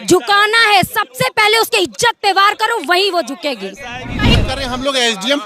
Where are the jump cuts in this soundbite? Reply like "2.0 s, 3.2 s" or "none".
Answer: 4.4 s